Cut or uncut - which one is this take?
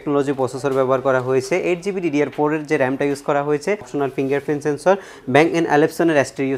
cut